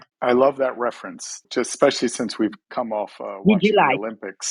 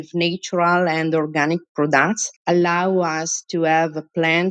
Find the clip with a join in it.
first; 1 cut; at 1.5 s

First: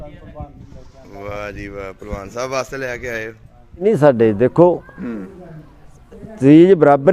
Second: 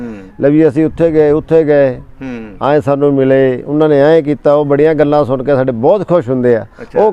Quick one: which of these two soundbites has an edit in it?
first; 1 cut; at 3.8 s

